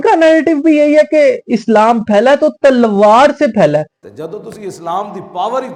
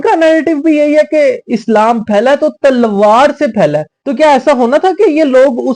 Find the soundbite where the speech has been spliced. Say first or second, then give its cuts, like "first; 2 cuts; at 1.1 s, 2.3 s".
second; 1 cut; at 4.0 s